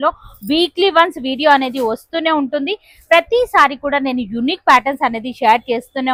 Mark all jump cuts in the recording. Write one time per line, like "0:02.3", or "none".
none

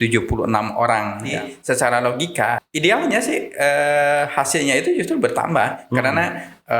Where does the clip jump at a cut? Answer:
0:01.3
0:02.6

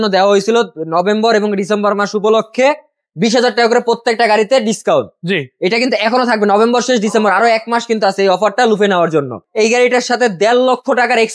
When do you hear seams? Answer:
0:09.4

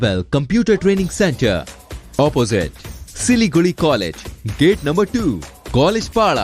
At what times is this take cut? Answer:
none

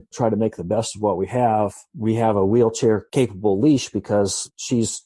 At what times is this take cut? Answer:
none

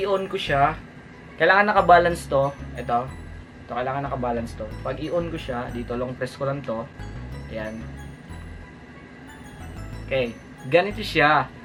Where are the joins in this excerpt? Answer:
none

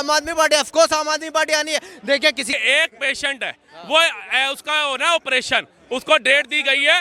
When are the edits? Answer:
0:02.5

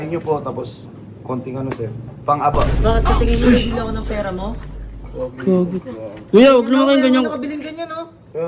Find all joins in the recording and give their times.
none

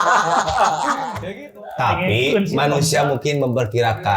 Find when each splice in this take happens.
0:01.3

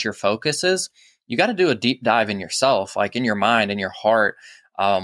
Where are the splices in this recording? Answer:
none

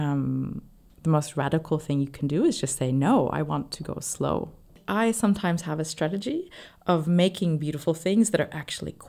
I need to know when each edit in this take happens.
0:04.8

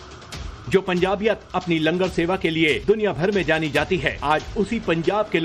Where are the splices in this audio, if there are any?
none

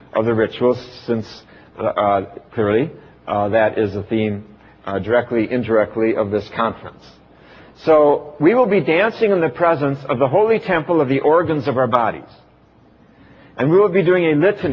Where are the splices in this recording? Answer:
0:01.8

